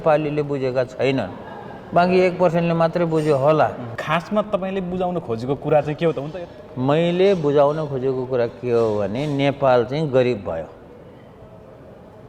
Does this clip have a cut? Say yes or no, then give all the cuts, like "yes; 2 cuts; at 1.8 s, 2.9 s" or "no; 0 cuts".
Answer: yes; 2 cuts; at 3.9 s, 6.3 s